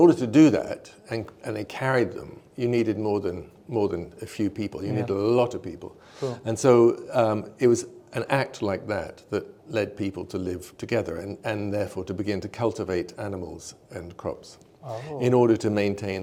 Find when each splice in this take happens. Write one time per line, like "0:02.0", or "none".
none